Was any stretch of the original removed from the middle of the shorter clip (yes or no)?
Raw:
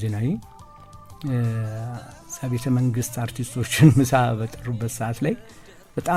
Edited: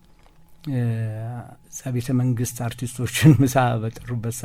no